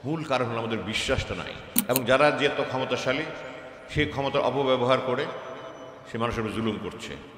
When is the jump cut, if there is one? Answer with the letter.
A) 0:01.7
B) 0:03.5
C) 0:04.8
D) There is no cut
A